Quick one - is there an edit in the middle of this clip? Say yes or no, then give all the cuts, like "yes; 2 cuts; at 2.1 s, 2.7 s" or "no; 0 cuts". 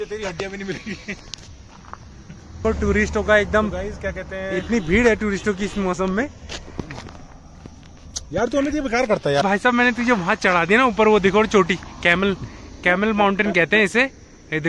no; 0 cuts